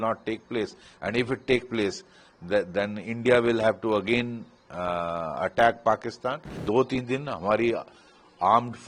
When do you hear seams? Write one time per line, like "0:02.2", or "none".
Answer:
0:06.5